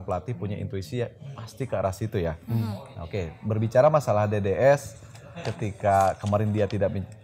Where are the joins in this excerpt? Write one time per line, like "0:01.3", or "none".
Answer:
none